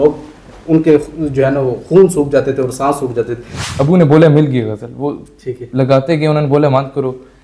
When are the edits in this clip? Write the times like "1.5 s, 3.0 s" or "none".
3.5 s

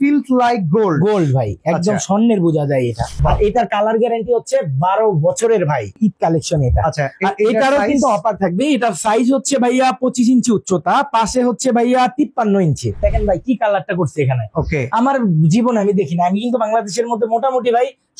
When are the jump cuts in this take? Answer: 3.1 s, 6.0 s, 13.0 s

